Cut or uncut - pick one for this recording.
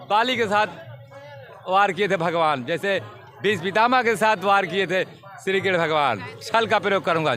uncut